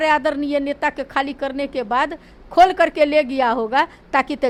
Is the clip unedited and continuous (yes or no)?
yes